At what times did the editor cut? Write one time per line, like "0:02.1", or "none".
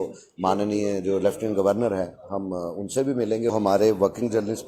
0:03.5